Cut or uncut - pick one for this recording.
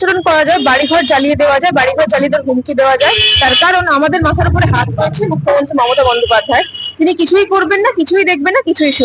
uncut